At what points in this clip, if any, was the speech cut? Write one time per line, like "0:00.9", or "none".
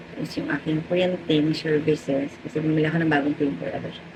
none